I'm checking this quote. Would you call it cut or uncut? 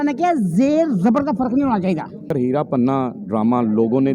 cut